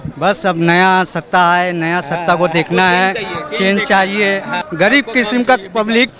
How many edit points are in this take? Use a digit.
1